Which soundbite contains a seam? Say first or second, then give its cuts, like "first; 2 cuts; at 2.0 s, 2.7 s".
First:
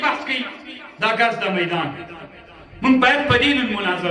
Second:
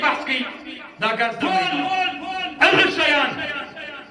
second; 1 cut; at 1.4 s